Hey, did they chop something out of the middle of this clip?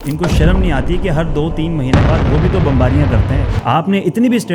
yes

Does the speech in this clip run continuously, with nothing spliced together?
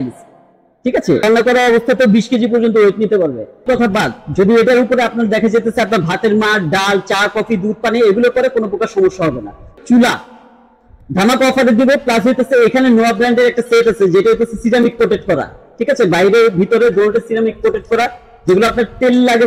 no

